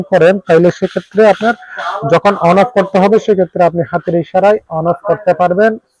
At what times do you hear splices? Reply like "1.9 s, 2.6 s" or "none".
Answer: none